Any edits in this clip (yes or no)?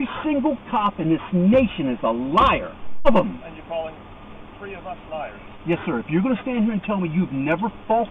yes